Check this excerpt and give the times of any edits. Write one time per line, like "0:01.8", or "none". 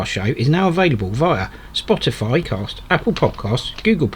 0:02.6